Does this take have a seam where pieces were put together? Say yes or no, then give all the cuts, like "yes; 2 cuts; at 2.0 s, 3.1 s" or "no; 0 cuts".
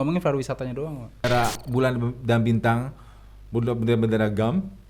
yes; 1 cut; at 1.2 s